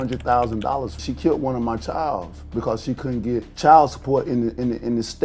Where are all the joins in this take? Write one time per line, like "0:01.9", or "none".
0:01.0
0:03.5